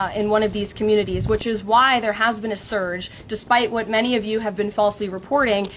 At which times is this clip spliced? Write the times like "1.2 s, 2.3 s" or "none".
3.3 s

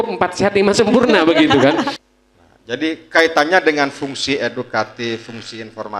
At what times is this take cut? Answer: 2.0 s

